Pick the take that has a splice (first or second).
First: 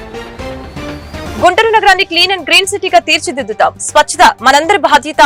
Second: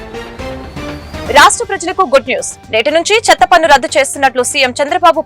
second